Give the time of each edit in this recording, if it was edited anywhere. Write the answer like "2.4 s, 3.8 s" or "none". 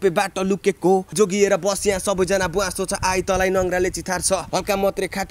1.1 s, 4.5 s